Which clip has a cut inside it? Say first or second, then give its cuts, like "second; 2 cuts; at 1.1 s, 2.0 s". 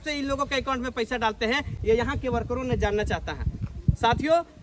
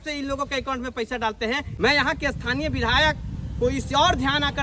second; 1 cut; at 1.7 s